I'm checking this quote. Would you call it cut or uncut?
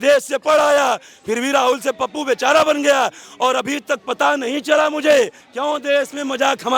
cut